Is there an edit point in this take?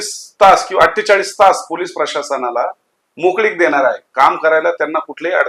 no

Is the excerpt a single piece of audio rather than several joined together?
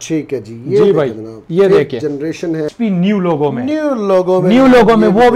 no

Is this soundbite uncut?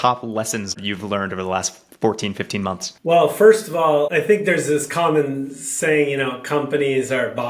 no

